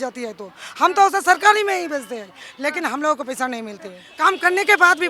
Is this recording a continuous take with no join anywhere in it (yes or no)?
no